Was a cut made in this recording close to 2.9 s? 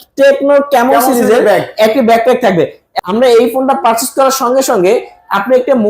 yes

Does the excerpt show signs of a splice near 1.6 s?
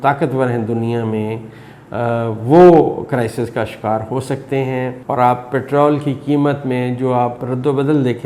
no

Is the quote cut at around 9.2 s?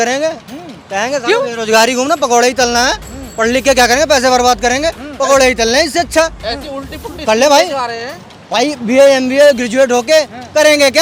no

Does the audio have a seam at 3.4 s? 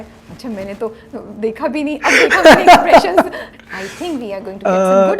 yes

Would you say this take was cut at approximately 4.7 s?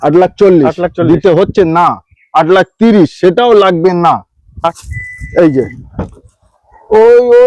yes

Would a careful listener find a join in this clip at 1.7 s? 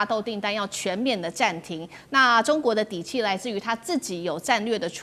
no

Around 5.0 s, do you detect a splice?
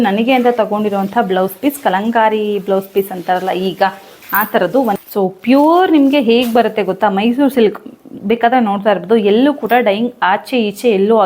yes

